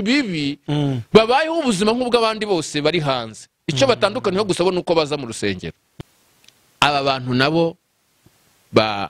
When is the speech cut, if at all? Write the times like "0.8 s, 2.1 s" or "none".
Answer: 5.8 s